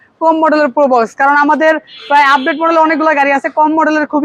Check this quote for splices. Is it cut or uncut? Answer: uncut